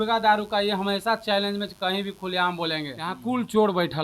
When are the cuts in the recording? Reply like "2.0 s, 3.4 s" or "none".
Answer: 3.1 s